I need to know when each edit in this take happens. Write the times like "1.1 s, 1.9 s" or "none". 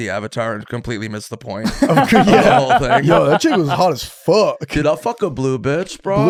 none